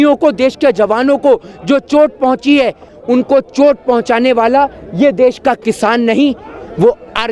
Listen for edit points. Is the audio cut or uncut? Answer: cut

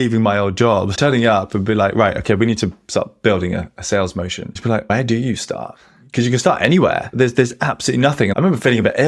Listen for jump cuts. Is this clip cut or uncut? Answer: cut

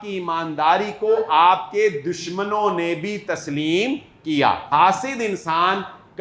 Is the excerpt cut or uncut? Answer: cut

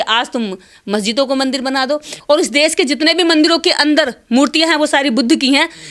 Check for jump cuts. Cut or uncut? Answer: cut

